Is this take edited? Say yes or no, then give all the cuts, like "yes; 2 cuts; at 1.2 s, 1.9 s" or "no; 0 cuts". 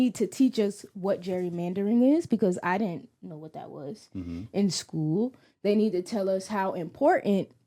no; 0 cuts